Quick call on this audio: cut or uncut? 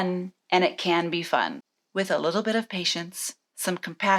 uncut